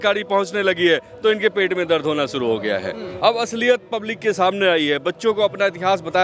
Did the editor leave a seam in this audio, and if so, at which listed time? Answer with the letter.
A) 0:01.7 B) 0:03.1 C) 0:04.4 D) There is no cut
B